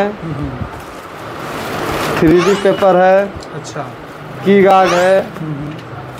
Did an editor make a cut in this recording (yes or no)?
no